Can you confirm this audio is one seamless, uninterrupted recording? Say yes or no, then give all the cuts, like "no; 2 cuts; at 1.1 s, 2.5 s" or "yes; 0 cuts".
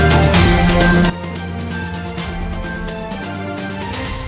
yes; 0 cuts